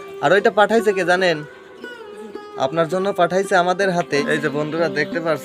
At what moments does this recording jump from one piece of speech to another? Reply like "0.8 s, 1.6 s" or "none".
4.2 s